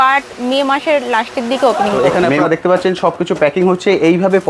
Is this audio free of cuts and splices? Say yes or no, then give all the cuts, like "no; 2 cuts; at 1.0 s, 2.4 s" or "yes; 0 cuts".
no; 1 cut; at 2.0 s